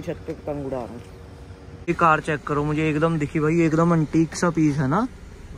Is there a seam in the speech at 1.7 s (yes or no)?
yes